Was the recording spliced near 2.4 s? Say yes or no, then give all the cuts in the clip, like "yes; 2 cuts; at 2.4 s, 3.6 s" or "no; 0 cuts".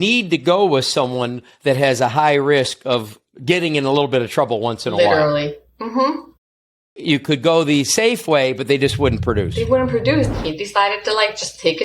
no; 1 cut; at 10.4 s